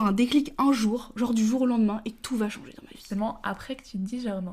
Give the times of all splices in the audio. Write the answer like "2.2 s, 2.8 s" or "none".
3.1 s